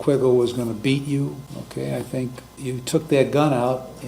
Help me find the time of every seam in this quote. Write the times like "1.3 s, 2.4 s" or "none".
1.5 s, 2.6 s